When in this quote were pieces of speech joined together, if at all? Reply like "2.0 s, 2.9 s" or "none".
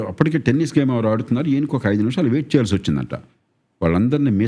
none